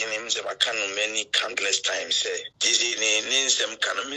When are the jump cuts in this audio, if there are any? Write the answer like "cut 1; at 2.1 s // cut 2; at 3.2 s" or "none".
cut 1; at 2.5 s